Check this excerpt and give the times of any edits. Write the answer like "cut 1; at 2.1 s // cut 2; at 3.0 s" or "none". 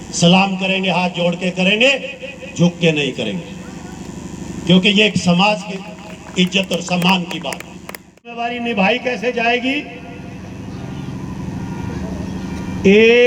cut 1; at 8.5 s